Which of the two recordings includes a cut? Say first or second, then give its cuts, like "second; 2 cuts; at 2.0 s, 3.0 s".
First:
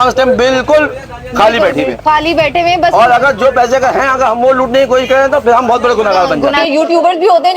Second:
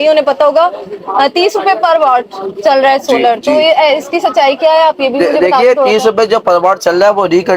first; 1 cut; at 6.6 s